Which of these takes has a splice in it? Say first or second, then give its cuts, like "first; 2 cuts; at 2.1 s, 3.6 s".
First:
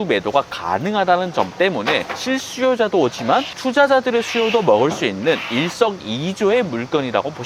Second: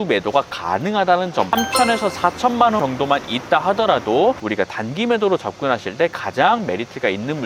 second; 2 cuts; at 1.5 s, 4.4 s